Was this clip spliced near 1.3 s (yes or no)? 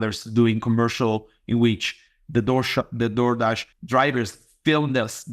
no